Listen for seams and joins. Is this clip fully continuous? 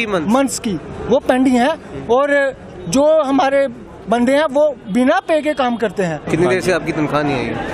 no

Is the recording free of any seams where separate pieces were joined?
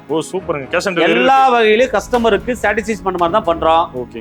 yes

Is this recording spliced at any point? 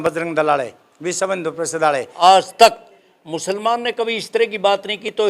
yes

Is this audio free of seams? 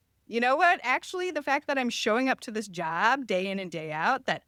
yes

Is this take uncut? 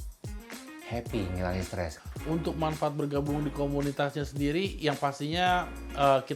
no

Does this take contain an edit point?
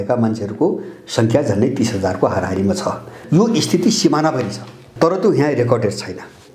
yes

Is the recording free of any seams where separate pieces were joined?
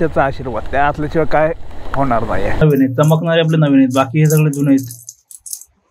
no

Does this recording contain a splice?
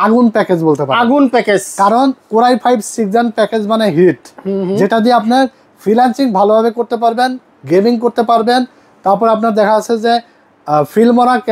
no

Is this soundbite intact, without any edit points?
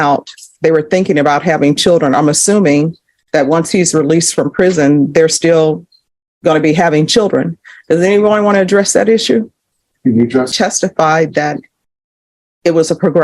no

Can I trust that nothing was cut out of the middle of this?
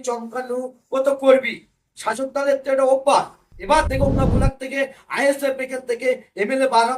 no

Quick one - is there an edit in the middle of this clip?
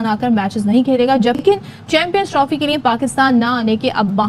no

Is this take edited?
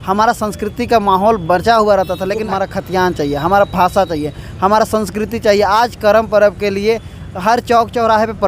yes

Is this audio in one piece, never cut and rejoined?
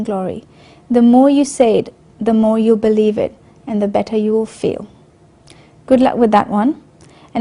yes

